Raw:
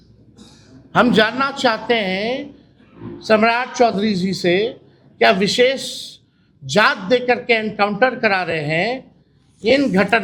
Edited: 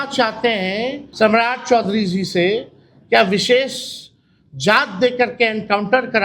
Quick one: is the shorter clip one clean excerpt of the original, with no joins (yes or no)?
no